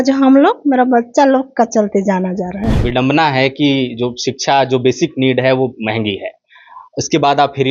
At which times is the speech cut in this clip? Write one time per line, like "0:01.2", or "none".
0:02.7